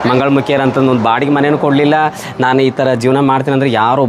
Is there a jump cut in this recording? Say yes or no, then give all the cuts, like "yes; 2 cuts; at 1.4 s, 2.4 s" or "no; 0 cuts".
no; 0 cuts